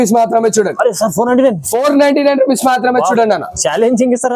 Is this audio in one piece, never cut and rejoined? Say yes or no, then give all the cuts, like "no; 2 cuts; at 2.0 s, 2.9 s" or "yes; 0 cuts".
yes; 0 cuts